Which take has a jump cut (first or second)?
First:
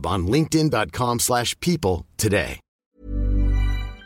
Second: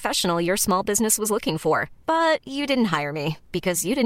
first